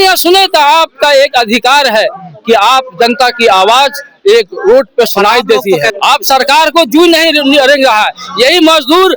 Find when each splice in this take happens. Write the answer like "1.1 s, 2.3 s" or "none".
5.9 s

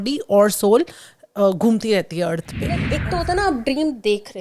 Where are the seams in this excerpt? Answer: 2.9 s

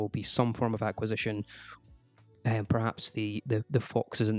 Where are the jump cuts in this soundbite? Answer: none

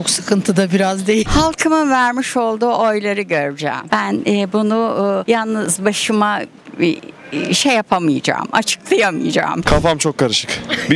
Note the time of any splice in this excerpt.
1.2 s, 9.6 s

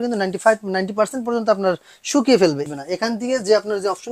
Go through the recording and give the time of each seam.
2.6 s

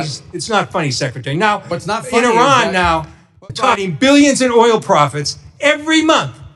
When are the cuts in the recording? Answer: 3.7 s

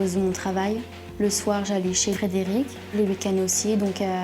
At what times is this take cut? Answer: 2.8 s

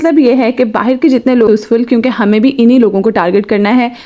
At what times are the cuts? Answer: 1.5 s

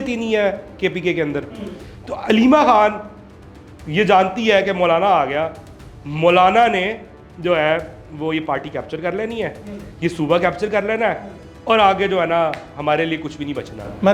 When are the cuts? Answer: 1.8 s

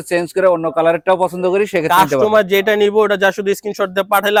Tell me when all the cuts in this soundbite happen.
none

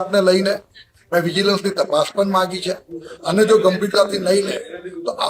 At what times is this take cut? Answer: 3.1 s

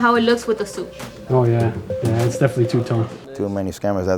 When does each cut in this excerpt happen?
2.0 s, 3.1 s

